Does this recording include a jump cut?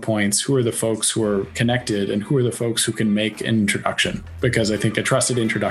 no; 0 cuts

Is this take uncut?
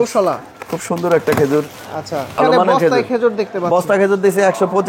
no; 1 cut; at 2.4 s

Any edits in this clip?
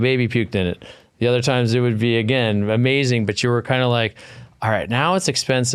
no; 0 cuts

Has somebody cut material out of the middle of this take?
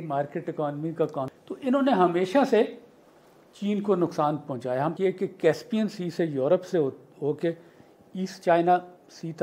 yes; 2 cuts; at 1.2 s, 4.9 s

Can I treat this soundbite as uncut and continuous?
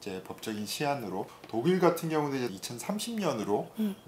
no; 2 cuts; at 1.4 s, 2.5 s

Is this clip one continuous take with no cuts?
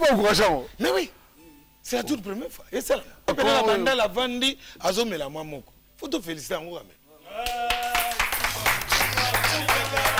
no; 1 cut; at 3.3 s

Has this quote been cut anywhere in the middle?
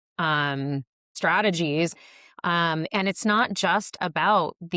yes; 2 cuts; at 1.1 s, 2.0 s

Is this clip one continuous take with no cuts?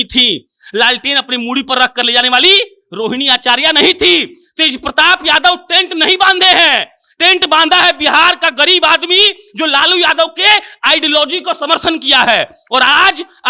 yes; 0 cuts

